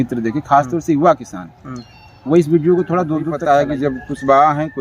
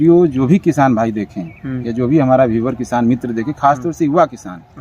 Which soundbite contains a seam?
first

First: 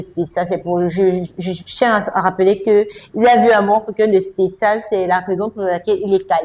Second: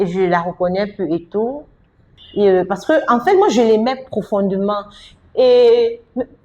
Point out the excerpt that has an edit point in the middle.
second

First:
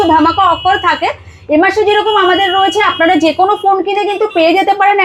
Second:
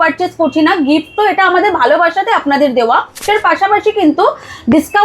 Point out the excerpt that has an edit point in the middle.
second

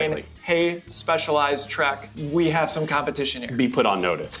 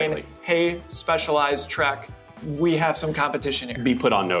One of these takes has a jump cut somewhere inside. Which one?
first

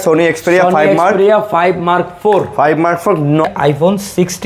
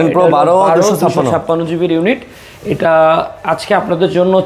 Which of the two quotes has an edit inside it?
first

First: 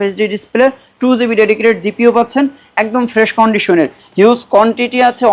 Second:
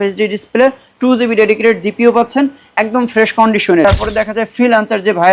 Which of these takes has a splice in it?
second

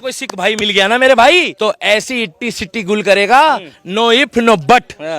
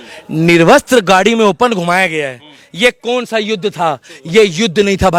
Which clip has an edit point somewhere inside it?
first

